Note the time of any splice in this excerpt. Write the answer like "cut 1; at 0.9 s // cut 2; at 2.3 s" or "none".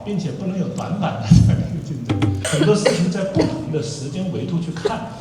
cut 1; at 2.5 s